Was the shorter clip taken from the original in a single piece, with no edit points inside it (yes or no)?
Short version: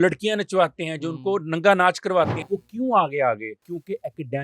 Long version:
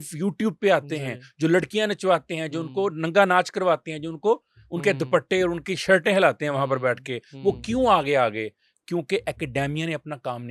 no